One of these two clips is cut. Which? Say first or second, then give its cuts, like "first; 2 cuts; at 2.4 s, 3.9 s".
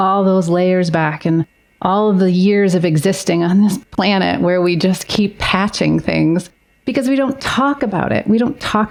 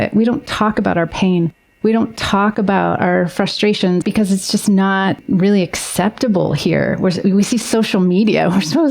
second; 2 cuts; at 4.0 s, 5.2 s